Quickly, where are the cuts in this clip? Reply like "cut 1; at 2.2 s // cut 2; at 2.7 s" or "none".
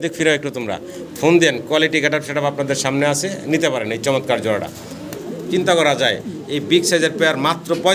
cut 1; at 5.2 s